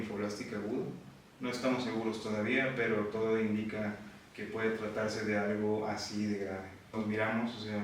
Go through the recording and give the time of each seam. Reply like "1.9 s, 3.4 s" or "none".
6.9 s

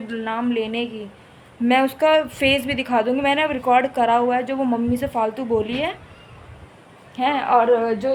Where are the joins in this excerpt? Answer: none

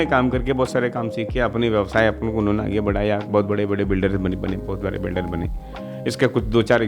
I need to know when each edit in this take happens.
none

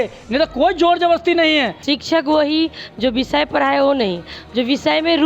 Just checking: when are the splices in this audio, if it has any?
1.8 s

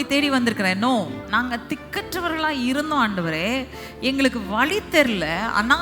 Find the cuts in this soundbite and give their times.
1.2 s

